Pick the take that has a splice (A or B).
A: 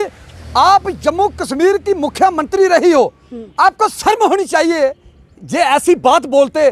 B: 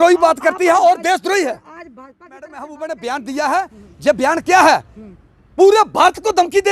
B